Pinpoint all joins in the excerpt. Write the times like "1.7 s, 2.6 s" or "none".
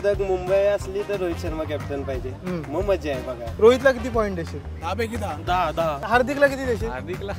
3.5 s, 6.0 s